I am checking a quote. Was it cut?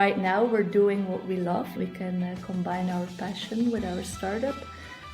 yes; 1 cut; at 1.8 s

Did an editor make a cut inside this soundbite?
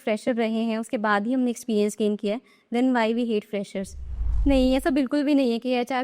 yes; 1 cut; at 4.2 s

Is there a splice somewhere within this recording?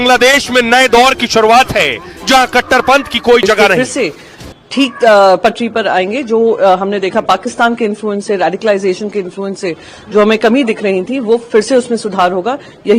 yes; 1 cut; at 3.8 s

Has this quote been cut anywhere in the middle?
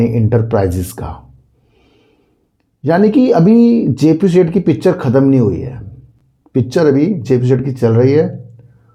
no; 0 cuts

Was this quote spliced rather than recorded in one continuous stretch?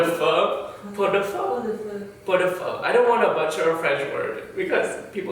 yes; 1 cut; at 2.8 s

